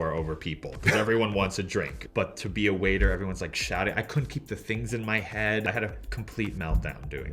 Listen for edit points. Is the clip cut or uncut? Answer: cut